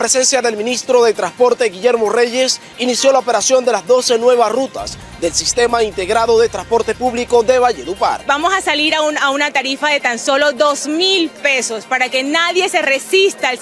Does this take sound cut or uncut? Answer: cut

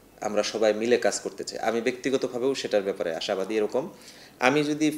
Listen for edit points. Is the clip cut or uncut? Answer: uncut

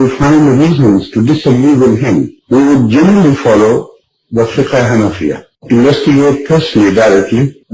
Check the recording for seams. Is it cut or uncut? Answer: uncut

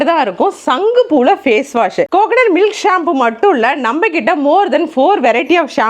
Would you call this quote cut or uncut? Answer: cut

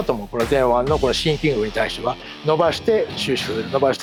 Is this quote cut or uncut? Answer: uncut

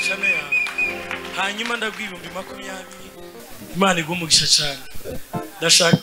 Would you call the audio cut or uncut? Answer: cut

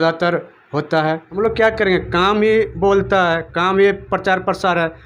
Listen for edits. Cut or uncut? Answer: cut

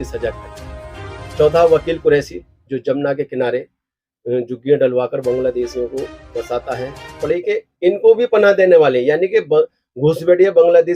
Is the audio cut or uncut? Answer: cut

